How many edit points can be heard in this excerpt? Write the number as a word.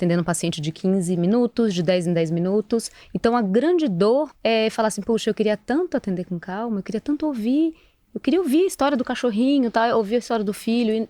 one